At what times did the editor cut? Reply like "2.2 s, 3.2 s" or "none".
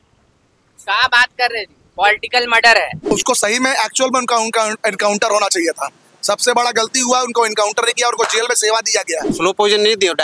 3.1 s, 9.2 s